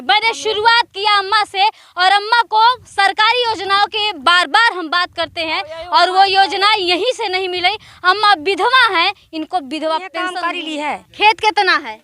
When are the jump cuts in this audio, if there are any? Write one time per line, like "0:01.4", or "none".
0:10.4